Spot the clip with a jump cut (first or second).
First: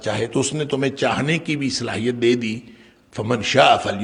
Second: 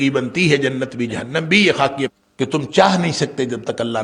second